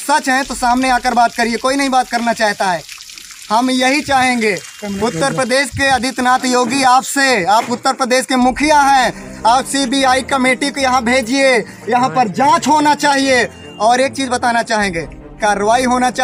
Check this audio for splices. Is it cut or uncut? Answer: uncut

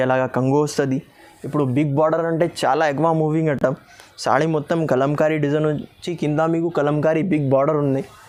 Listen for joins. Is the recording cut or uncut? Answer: uncut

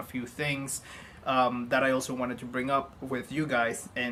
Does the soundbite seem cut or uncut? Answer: uncut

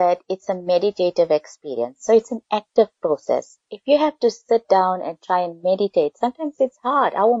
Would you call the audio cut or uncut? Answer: uncut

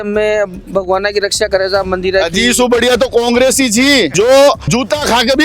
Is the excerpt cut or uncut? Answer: cut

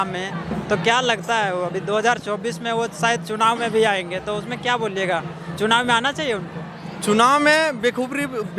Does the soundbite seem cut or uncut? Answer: uncut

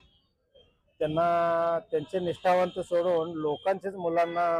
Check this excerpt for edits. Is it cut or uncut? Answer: uncut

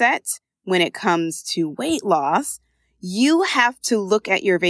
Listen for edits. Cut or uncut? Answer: uncut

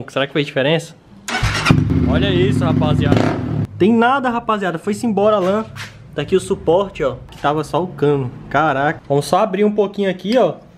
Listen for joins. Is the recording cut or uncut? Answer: cut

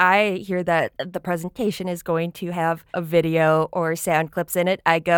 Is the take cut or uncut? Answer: cut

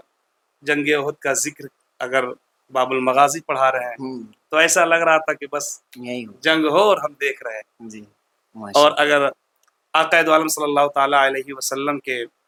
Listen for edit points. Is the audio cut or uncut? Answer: uncut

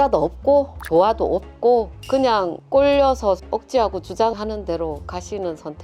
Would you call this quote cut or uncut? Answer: uncut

